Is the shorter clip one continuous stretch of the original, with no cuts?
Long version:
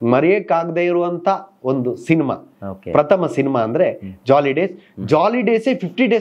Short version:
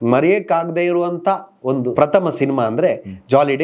no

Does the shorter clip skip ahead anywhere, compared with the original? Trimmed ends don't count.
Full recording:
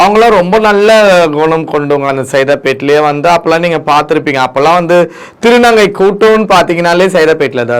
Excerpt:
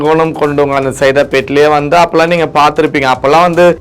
no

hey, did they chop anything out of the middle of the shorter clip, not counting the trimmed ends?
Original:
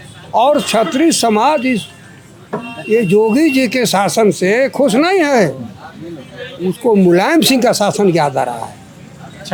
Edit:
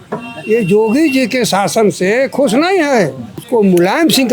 yes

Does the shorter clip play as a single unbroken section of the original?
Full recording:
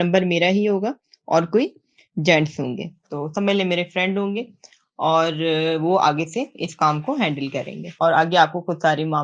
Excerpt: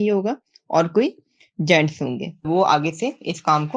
no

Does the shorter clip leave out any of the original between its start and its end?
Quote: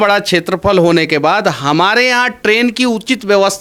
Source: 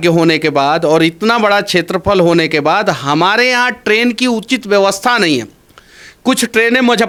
no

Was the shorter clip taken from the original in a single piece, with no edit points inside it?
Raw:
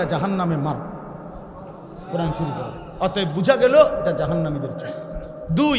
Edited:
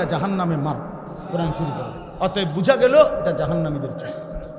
no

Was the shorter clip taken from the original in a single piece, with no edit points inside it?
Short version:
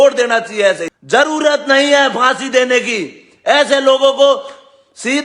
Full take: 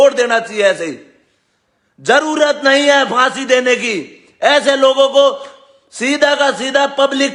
no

